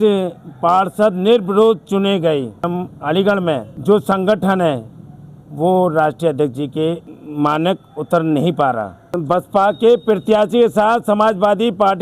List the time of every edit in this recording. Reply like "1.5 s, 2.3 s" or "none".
2.7 s, 3.7 s, 7.1 s, 9.2 s